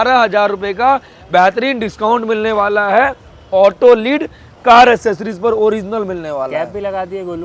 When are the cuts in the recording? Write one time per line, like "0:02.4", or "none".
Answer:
none